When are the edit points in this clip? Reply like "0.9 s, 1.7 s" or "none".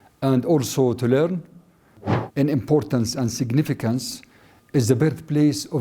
2.0 s